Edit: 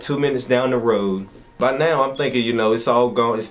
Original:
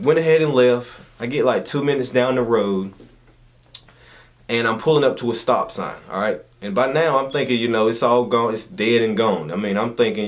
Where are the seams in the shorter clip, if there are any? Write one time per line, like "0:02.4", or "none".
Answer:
0:01.4